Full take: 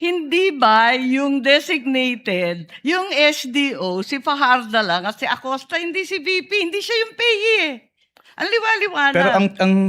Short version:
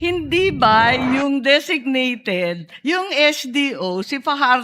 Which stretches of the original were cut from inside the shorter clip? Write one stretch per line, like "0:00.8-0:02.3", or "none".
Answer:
none